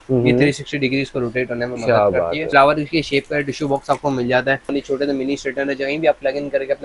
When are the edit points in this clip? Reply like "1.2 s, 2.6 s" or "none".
2.4 s, 4.7 s